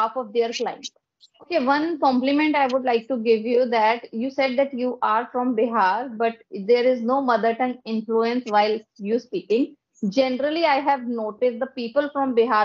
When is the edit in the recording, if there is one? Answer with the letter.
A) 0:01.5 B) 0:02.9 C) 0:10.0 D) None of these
A